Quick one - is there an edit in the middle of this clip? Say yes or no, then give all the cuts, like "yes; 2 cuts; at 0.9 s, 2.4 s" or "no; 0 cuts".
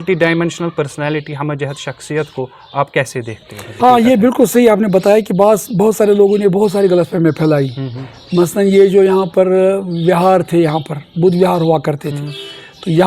yes; 1 cut; at 3.7 s